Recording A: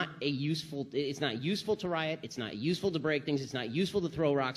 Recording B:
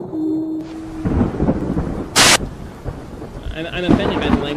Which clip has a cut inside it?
A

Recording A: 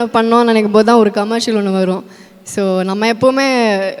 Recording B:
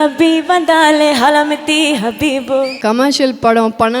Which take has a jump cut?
B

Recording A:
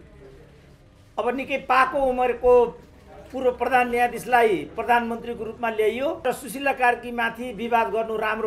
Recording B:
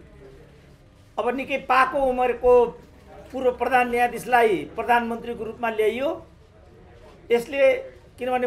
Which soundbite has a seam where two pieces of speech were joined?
A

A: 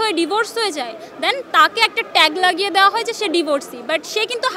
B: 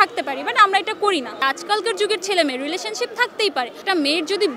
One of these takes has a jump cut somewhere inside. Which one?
B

